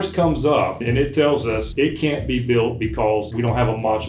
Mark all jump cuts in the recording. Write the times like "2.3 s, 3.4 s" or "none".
0.8 s, 1.7 s, 3.3 s